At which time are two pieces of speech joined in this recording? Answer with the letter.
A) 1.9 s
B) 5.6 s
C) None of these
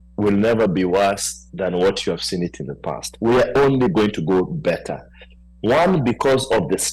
C